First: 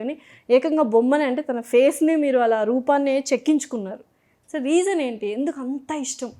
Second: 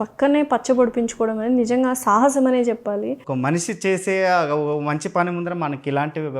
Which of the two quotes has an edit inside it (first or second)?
second